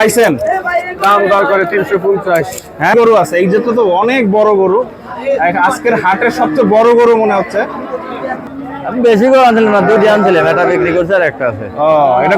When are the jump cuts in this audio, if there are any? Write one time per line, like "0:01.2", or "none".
0:02.9
0:08.4